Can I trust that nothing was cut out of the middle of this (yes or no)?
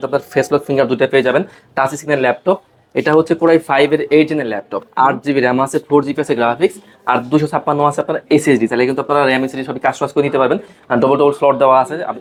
yes